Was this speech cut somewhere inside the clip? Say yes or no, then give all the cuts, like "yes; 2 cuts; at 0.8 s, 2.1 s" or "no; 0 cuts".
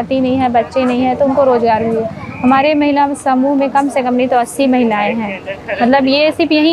no; 0 cuts